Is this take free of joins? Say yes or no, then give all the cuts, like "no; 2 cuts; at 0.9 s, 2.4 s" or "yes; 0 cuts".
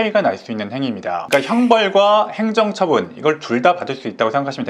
no; 1 cut; at 1.2 s